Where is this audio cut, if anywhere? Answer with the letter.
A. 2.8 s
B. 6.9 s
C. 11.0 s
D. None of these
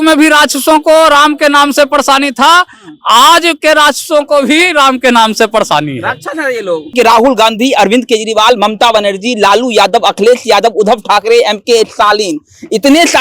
B